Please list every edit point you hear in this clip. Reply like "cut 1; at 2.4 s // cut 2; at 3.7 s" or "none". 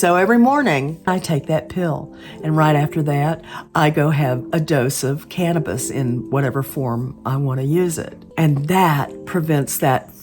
cut 1; at 1.1 s // cut 2; at 4.4 s // cut 3; at 8.2 s